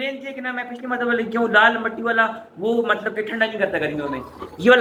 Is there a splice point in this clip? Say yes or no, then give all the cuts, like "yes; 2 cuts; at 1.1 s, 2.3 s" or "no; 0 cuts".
no; 0 cuts